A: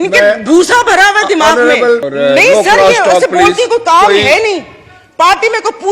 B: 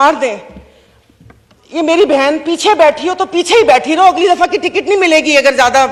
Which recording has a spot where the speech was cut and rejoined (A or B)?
A